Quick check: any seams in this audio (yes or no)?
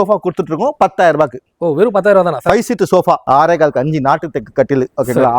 yes